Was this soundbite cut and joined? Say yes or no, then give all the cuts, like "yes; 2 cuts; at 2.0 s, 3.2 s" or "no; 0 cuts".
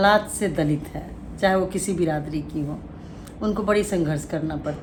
no; 0 cuts